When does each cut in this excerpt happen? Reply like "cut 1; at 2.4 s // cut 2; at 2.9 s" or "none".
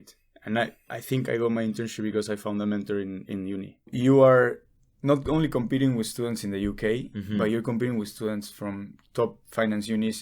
cut 1; at 3.9 s

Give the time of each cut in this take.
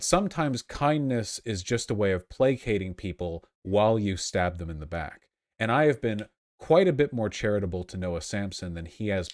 none

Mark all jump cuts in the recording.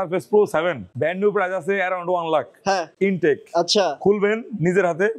cut 1; at 0.8 s // cut 2; at 2.9 s

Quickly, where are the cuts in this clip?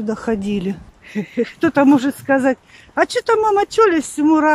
cut 1; at 0.9 s

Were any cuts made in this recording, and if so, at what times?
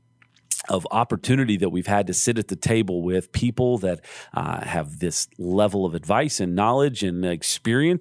none

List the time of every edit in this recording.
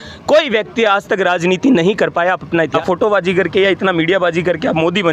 cut 1; at 2.7 s

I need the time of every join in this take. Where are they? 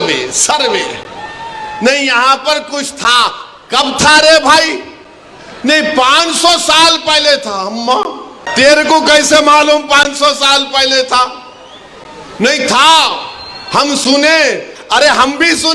cut 1; at 8.4 s

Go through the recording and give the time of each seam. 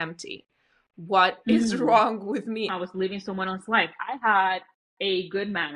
cut 1; at 2.7 s

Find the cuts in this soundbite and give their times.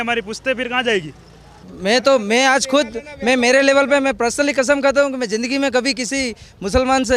cut 1; at 1.7 s

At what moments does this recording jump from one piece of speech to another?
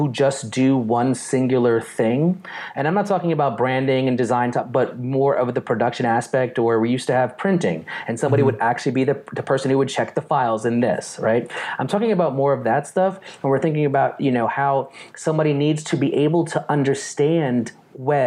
none

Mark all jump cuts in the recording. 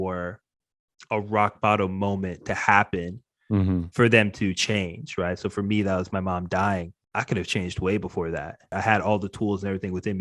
cut 1; at 7.0 s // cut 2; at 8.7 s

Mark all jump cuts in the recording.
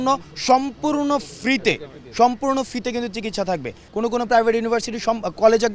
cut 1; at 3.9 s

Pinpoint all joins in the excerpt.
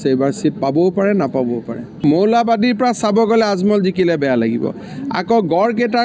cut 1; at 2.0 s

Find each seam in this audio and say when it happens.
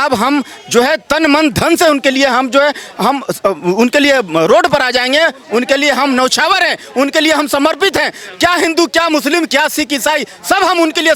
none

